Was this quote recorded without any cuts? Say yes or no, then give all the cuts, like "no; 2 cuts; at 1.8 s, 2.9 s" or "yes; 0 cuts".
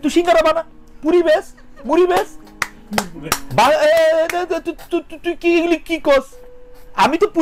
yes; 0 cuts